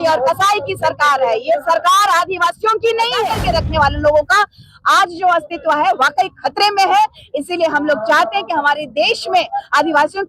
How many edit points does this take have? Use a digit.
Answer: 1